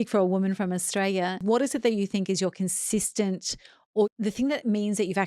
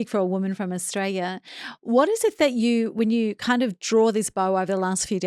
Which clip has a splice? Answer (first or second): first